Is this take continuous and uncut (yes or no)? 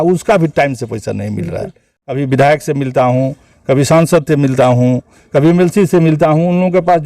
no